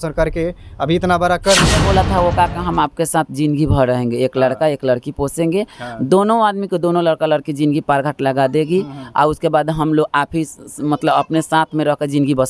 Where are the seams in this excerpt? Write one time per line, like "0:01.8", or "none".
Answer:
0:01.8